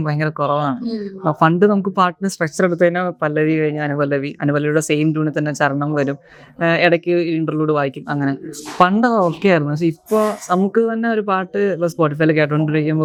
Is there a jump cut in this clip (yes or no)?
no